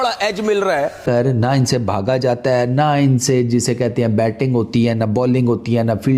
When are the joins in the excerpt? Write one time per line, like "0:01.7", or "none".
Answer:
0:01.0